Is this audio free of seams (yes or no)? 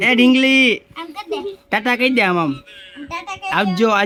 yes